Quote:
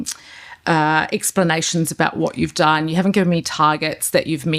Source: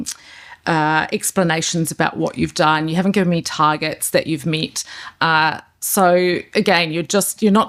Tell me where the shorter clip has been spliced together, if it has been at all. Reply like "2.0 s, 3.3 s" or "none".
none

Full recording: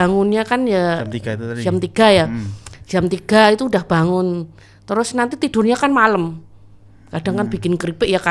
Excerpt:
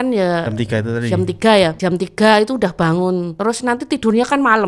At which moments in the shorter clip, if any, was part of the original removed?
1.8 s, 3.3 s

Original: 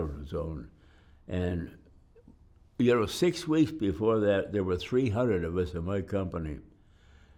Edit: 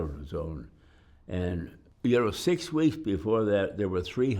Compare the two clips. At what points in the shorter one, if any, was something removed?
1.8 s

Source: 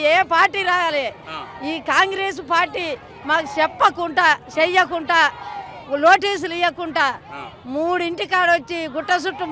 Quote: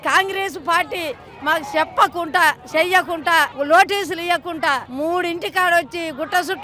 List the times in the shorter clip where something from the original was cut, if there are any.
3.5 s, 4.9 s

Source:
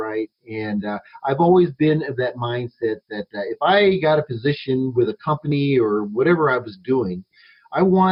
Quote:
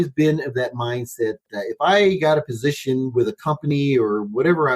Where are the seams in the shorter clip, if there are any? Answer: 1.4 s

